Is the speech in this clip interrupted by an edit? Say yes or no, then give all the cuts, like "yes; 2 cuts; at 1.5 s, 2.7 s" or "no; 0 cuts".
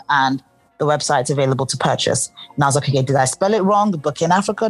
no; 0 cuts